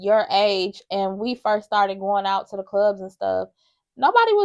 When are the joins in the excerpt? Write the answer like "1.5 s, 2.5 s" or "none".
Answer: none